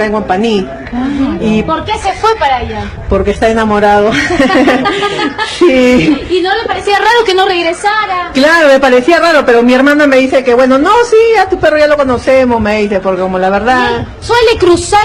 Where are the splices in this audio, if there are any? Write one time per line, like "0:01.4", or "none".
none